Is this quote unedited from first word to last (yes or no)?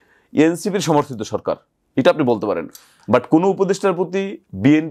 yes